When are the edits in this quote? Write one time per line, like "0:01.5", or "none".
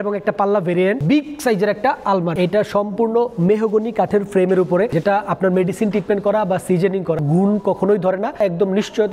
0:01.0
0:02.3
0:04.9
0:07.2
0:08.4